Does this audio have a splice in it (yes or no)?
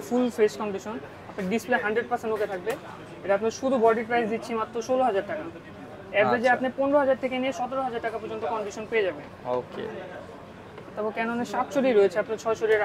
no